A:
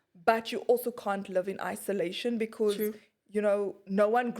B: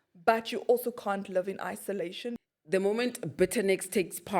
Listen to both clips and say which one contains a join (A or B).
B